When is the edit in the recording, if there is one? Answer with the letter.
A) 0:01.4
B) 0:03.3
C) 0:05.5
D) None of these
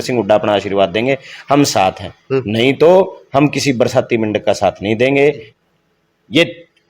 C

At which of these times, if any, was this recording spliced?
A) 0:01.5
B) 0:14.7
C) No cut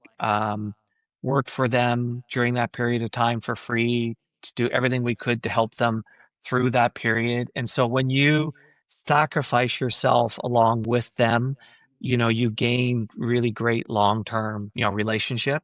B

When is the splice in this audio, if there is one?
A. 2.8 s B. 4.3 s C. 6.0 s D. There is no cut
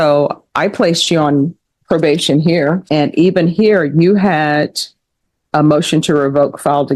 A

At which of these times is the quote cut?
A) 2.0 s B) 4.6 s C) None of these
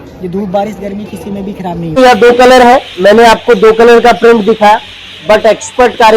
A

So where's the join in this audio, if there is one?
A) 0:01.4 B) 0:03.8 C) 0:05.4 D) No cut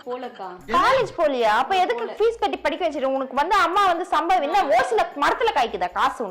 D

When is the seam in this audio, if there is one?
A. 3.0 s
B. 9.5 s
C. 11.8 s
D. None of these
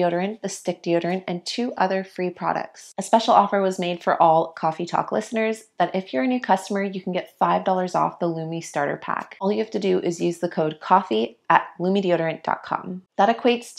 A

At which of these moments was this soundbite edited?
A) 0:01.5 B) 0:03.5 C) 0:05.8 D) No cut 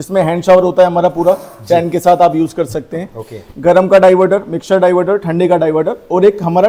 D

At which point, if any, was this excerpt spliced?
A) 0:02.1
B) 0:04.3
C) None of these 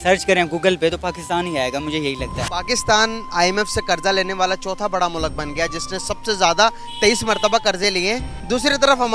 A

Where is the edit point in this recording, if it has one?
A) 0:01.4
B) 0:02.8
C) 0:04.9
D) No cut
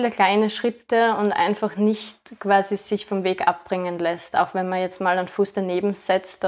D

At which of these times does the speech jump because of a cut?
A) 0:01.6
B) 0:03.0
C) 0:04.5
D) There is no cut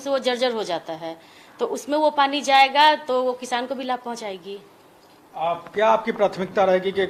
D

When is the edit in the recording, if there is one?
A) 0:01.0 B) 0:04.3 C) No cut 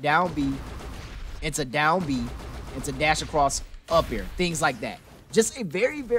C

